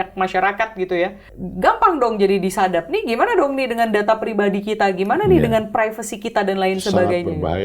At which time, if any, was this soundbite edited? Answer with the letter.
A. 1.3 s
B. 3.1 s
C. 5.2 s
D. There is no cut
A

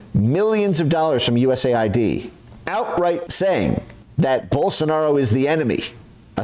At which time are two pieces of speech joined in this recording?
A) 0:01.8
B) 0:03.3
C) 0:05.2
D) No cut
B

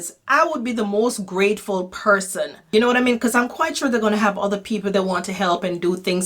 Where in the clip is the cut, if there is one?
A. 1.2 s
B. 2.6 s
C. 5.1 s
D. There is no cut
B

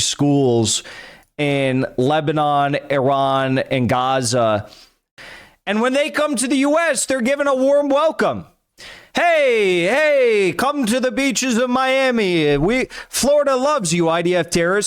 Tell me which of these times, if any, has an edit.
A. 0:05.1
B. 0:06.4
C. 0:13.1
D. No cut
A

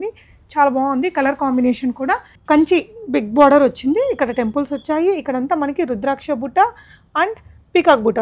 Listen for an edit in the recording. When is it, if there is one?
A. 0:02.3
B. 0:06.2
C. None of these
A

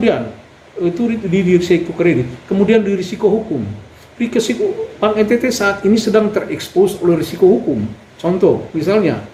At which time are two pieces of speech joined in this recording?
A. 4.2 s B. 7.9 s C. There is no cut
C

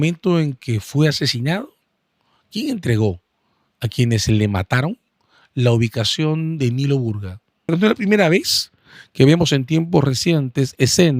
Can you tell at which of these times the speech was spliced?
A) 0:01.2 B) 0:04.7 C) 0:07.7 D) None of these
C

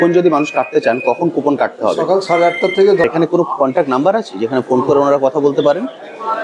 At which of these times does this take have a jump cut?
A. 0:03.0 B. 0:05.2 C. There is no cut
A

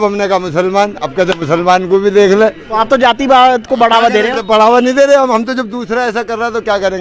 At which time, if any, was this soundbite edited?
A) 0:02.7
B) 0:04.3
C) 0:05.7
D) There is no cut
D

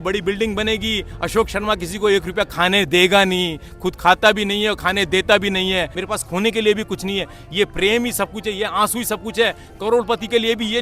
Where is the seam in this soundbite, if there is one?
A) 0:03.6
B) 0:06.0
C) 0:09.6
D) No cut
B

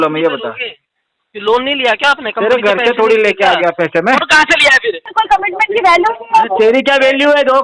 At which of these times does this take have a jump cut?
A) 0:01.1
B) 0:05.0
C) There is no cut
B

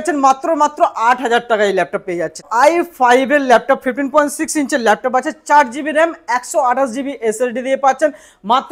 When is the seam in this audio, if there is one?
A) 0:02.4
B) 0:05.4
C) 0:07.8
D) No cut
A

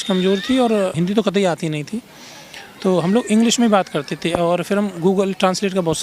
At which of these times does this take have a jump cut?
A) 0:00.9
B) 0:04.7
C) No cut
A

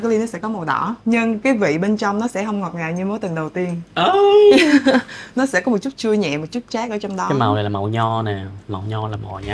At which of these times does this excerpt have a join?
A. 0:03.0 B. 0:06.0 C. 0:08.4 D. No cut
D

